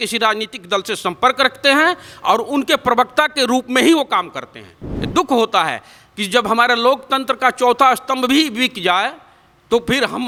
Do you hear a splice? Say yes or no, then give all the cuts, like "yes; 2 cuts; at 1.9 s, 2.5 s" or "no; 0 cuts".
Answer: no; 0 cuts